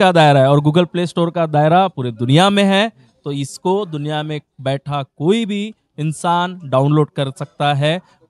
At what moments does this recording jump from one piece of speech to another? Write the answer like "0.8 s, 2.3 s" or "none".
none